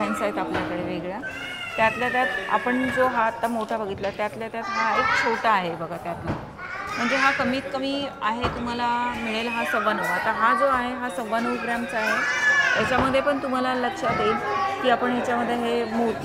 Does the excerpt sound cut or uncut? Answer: uncut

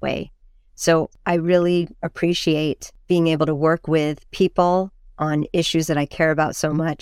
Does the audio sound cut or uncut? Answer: cut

